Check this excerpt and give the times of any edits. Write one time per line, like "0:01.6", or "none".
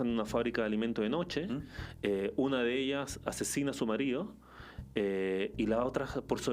none